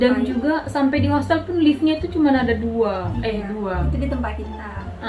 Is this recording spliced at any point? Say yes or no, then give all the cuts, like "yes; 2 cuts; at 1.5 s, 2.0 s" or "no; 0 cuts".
no; 0 cuts